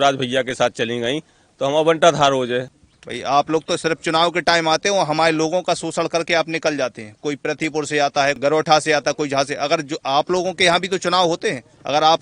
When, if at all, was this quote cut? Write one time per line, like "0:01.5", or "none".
0:02.8
0:08.4